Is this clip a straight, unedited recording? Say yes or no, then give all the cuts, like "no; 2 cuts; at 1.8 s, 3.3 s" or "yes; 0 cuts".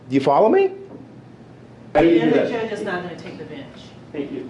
no; 1 cut; at 1.9 s